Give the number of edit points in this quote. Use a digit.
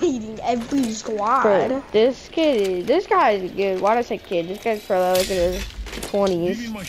0